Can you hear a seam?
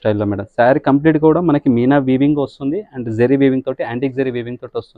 no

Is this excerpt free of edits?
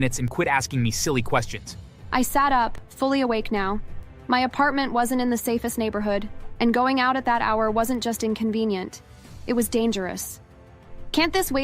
yes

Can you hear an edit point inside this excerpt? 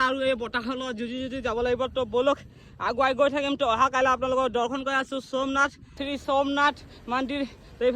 yes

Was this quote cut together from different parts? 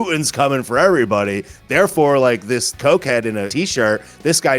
yes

